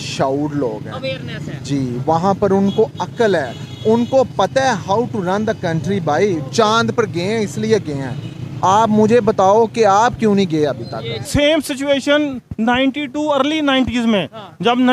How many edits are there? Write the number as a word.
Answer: one